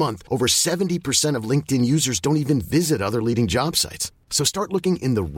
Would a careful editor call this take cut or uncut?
uncut